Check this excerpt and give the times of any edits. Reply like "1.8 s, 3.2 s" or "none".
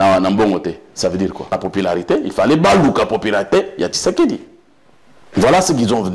1.5 s